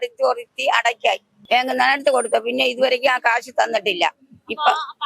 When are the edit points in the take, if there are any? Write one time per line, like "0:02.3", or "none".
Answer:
0:01.3

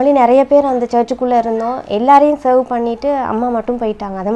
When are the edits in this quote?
none

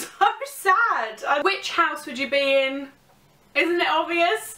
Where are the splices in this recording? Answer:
0:01.4

